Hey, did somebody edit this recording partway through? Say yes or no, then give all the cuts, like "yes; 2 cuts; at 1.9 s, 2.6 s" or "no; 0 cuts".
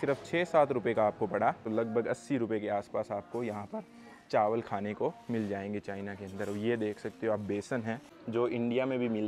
yes; 2 cuts; at 1.6 s, 8.1 s